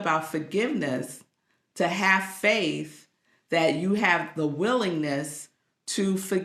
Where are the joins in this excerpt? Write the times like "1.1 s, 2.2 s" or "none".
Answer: none